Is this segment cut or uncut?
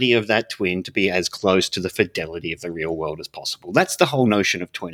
uncut